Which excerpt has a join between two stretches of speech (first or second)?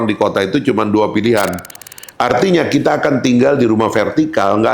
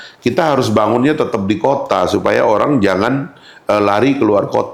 first